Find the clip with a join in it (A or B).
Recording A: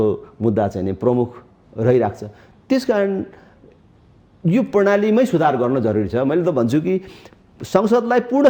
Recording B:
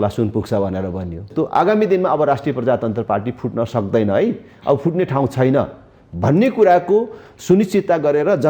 B